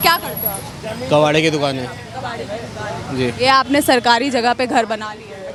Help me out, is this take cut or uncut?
uncut